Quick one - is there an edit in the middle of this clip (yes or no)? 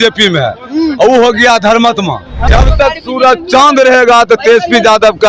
yes